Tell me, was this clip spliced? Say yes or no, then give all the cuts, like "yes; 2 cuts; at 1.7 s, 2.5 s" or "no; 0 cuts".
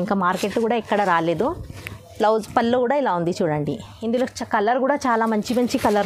no; 0 cuts